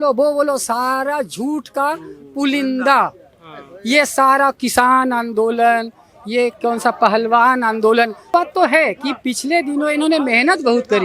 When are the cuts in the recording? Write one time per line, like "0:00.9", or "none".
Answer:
0:08.3